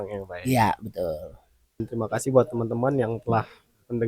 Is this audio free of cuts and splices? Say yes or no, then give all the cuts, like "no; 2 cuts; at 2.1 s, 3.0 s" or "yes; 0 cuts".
no; 1 cut; at 1.9 s